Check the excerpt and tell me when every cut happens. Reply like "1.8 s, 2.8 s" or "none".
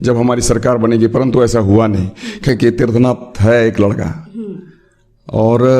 2.5 s